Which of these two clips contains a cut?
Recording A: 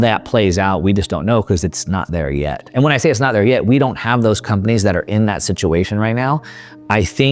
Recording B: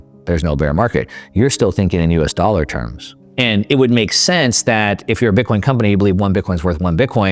B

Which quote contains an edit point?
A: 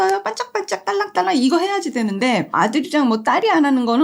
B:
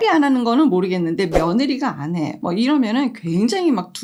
A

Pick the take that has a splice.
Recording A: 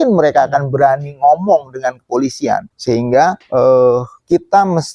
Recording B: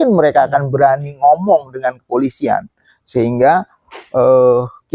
A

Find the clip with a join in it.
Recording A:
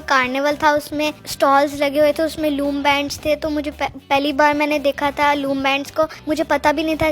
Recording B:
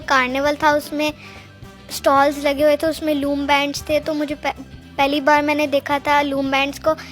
A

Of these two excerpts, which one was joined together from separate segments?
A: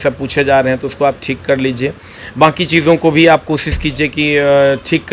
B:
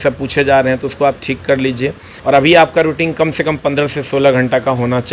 B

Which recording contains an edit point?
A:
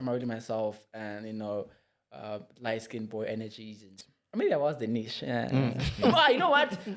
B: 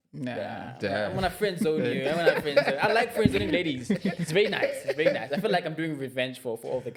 A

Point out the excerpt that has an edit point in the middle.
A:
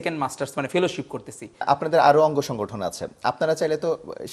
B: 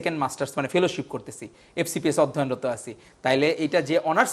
A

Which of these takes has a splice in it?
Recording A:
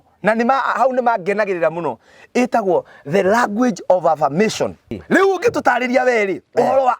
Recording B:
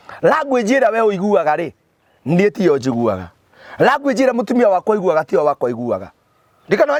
A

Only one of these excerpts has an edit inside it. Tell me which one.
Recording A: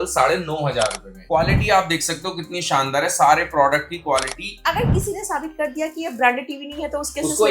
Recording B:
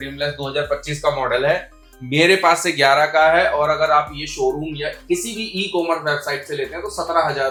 A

